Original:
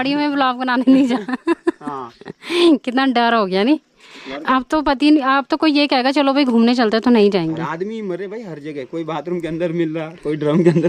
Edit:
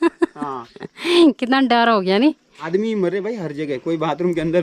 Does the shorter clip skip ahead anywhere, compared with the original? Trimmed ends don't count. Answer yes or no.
yes